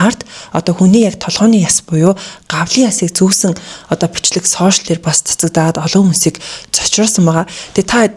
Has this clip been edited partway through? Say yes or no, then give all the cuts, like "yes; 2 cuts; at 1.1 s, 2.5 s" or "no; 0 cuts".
no; 0 cuts